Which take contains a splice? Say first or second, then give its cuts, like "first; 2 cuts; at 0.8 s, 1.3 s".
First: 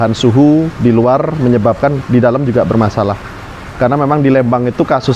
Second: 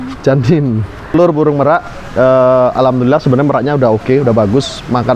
second; 1 cut; at 1.1 s